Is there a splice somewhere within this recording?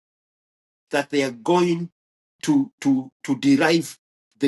no; 0 cuts

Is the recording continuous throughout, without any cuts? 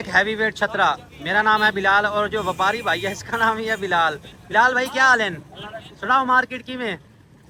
yes; 0 cuts

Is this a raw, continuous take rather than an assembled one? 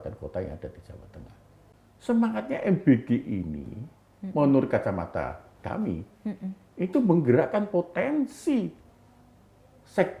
no; 1 cut; at 1.6 s

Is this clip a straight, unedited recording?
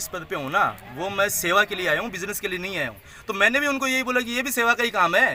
yes; 0 cuts

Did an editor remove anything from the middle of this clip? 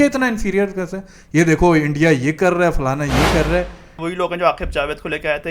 yes; 1 cut; at 4.0 s

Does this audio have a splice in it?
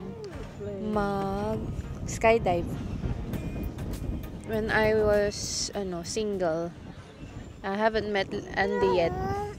no; 0 cuts

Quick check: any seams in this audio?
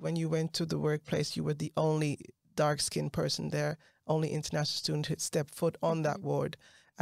no; 0 cuts

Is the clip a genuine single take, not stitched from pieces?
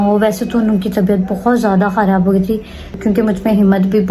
no; 1 cut; at 2.9 s

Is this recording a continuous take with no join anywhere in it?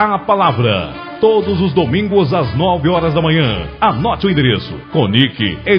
no; 1 cut; at 1.0 s

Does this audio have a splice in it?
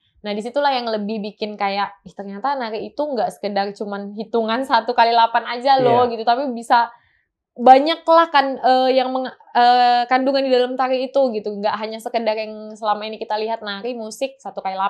no; 0 cuts

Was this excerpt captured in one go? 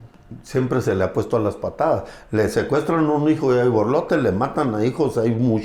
yes; 0 cuts

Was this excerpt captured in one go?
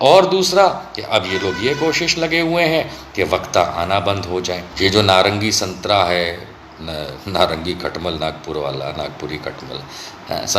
no; 1 cut; at 4.7 s

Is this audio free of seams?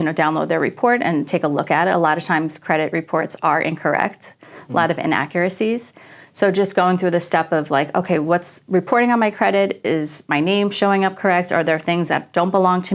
yes; 0 cuts

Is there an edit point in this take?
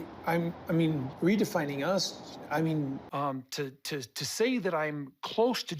yes; 2 cuts; at 1.1 s, 3.0 s

